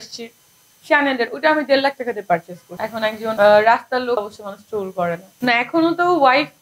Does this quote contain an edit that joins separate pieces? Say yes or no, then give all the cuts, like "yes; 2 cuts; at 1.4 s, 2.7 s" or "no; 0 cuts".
yes; 3 cuts; at 2.9 s, 4.2 s, 5.3 s